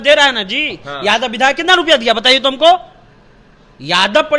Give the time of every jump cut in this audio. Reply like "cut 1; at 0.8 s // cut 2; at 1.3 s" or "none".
none